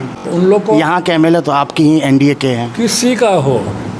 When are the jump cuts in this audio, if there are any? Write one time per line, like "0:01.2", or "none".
none